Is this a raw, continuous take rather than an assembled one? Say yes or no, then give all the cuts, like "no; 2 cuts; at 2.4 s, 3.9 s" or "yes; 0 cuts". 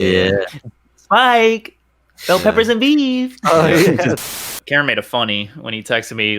no; 1 cut; at 4.6 s